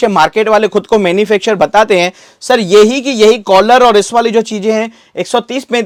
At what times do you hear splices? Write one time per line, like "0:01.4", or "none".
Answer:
none